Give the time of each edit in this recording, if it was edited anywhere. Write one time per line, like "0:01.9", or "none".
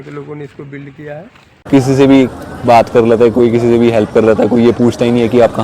0:01.6